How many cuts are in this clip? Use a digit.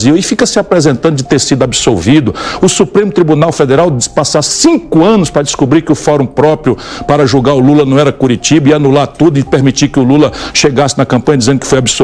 0